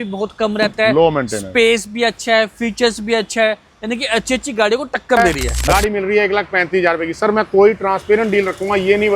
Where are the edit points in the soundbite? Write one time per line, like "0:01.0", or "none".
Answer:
0:05.5